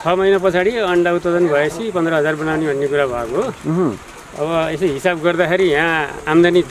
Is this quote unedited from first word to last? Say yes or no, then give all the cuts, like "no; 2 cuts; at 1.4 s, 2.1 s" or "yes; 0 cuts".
yes; 0 cuts